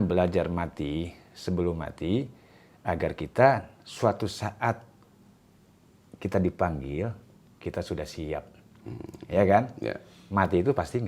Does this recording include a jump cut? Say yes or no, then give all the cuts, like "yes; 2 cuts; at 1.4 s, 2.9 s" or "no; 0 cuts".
no; 0 cuts